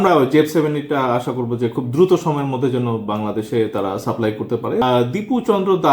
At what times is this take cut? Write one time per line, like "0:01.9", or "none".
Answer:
0:04.8

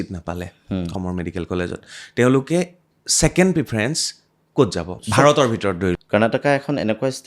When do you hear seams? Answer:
0:00.9
0:05.0
0:06.0

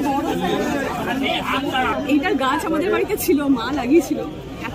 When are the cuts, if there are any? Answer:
0:01.9

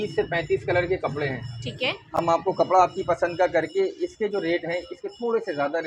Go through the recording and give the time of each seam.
none

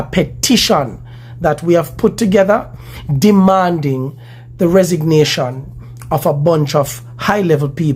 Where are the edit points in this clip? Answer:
none

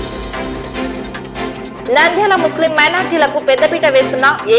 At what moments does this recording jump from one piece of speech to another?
none

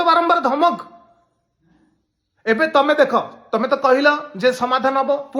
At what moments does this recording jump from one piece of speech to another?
none

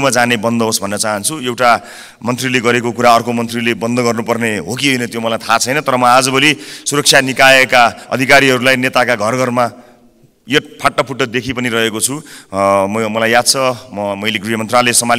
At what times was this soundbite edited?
none

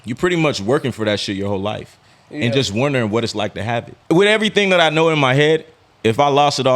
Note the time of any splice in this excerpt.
0:03.9

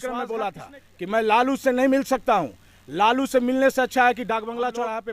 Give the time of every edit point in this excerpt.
none

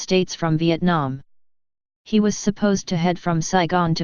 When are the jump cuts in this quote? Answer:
0:01.0

